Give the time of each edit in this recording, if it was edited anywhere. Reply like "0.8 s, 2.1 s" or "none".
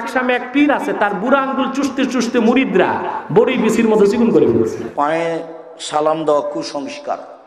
4.8 s

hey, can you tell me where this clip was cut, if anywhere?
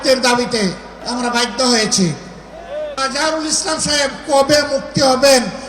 1.0 s, 3.0 s

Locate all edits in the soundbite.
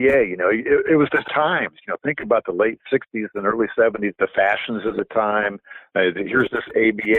4.1 s

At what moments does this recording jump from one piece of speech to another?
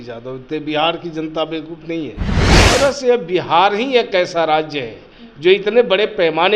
2.6 s

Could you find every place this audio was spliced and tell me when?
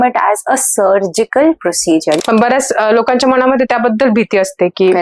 2.2 s

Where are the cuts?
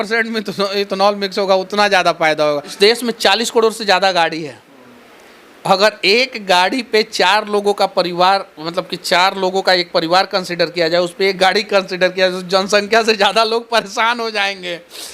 2.7 s

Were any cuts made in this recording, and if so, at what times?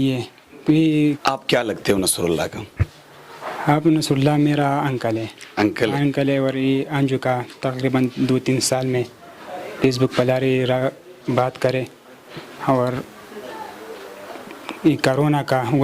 1.2 s

